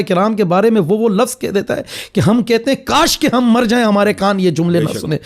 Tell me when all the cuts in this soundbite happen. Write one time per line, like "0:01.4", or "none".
none